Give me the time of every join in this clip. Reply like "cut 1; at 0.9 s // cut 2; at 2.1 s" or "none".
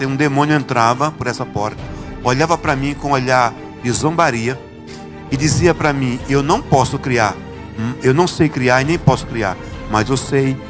none